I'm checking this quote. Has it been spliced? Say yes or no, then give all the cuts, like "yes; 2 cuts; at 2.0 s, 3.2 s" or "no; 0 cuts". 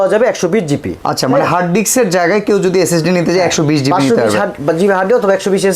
no; 0 cuts